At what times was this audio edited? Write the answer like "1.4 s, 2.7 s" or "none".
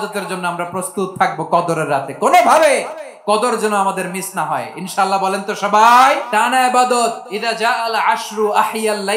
6.2 s, 7.3 s